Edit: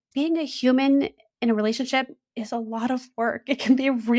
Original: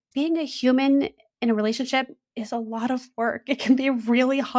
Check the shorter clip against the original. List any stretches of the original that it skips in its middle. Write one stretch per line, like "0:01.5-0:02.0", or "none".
none

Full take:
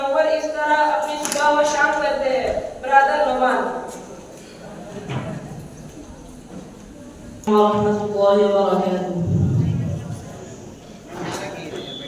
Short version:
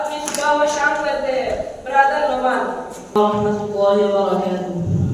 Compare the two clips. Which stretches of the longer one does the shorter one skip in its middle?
0:04.1-0:07.6

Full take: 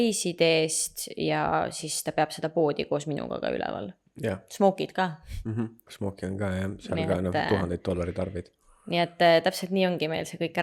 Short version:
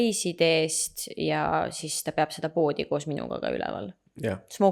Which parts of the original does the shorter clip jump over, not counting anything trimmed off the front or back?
none

